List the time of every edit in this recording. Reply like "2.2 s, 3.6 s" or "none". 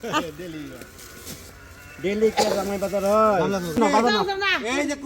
3.8 s